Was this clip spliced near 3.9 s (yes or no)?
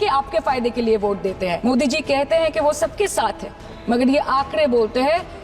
no